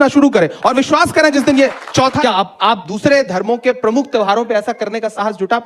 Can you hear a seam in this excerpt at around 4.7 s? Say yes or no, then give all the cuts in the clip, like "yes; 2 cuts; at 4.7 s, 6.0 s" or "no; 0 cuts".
no; 1 cut; at 2.2 s